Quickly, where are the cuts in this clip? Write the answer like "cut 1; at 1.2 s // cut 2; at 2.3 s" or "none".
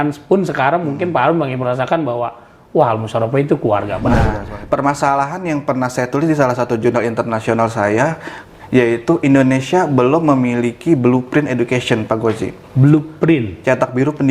cut 1; at 4.2 s